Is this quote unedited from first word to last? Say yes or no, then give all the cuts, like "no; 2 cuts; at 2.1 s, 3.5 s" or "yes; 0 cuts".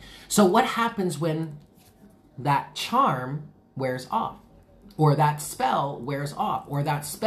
yes; 0 cuts